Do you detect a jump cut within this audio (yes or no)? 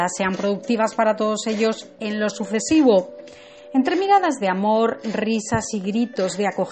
no